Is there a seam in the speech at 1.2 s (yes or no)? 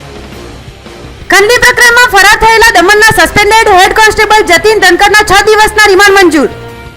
yes